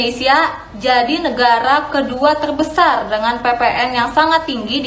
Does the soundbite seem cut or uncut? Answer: uncut